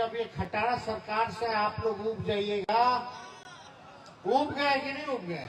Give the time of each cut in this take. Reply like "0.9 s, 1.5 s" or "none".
none